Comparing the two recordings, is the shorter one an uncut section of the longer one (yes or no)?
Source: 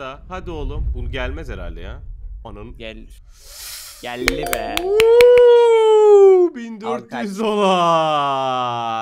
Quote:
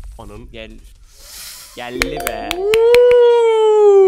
yes